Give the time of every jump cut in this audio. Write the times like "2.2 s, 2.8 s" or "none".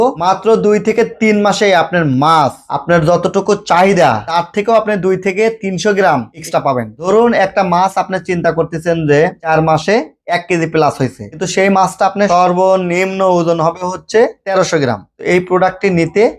none